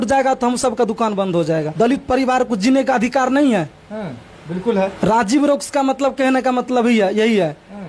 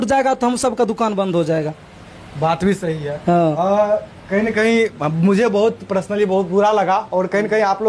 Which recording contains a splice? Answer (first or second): first